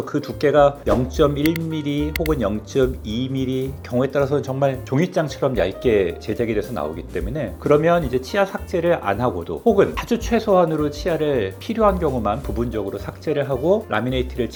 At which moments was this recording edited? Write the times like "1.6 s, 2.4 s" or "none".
none